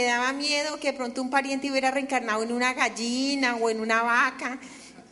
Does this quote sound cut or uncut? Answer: uncut